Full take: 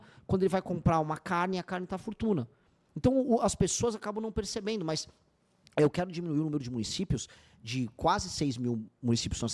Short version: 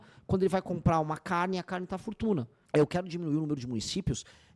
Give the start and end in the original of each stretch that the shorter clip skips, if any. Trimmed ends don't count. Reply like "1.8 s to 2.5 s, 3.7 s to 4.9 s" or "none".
2.6 s to 5.6 s